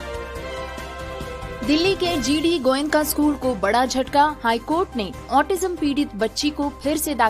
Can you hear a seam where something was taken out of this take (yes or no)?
yes